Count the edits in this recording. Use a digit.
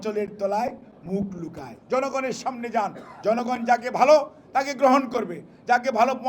1